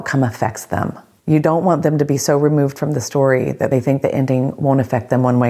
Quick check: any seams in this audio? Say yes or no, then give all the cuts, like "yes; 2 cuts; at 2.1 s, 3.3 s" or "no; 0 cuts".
yes; 2 cuts; at 1.1 s, 3.7 s